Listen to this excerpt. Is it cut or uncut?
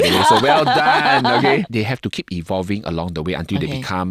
cut